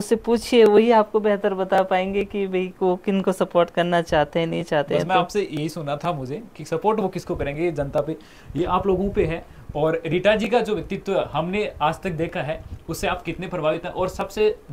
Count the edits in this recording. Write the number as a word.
zero